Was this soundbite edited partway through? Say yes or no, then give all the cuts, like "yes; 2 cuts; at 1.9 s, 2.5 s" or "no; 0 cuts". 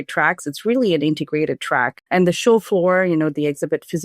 yes; 1 cut; at 1.9 s